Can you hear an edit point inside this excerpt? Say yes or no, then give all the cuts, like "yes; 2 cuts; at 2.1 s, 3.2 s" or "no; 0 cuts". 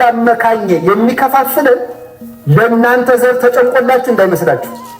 no; 0 cuts